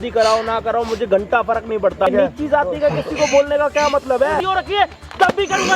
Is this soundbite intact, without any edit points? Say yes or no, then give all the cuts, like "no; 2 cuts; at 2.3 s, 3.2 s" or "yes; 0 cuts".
no; 2 cuts; at 2.1 s, 4.4 s